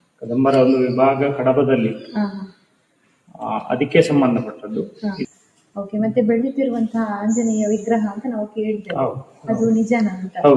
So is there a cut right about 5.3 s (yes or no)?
yes